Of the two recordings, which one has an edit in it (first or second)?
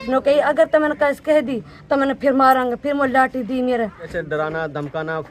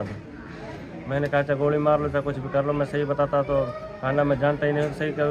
first